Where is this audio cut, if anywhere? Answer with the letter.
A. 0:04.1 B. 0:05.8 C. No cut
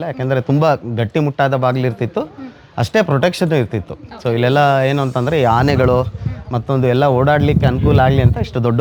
C